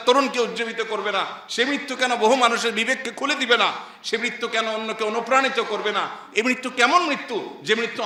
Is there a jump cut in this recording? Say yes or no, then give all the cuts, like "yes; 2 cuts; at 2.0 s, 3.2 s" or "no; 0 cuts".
no; 0 cuts